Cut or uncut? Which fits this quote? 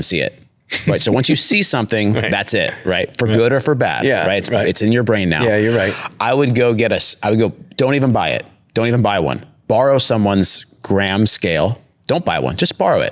uncut